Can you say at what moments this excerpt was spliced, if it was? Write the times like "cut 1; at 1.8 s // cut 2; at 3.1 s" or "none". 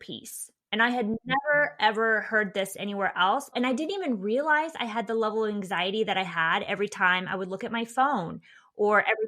cut 1; at 3.5 s